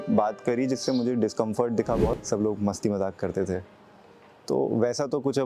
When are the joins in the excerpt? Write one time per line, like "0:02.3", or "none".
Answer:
0:02.2